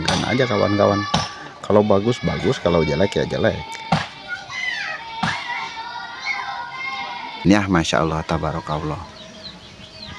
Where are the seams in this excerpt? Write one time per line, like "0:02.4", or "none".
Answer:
0:07.4